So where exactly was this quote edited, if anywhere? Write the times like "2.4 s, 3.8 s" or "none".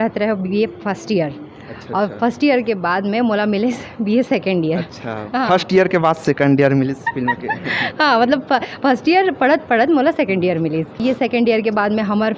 11.0 s